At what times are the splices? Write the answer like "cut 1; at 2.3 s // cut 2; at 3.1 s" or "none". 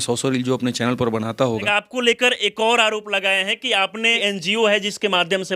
cut 1; at 1.7 s // cut 2; at 4.2 s